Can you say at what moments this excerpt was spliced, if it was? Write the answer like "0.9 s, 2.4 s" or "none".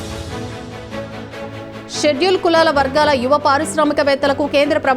1.3 s